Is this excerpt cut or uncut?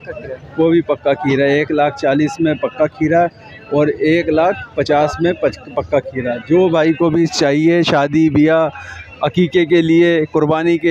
uncut